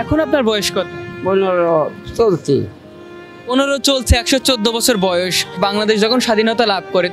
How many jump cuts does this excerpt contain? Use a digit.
2